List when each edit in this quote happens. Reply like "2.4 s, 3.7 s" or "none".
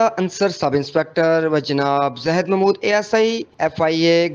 none